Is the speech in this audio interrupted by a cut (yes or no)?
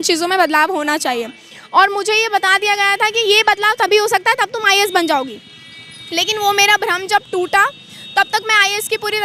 no